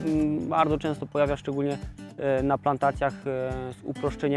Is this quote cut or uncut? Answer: uncut